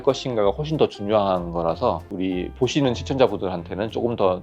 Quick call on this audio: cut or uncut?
cut